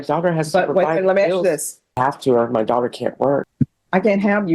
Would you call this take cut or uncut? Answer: cut